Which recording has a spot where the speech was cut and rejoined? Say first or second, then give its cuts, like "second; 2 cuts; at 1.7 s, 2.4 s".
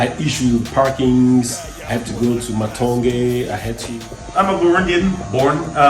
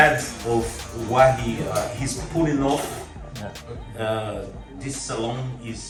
first; 1 cut; at 4.2 s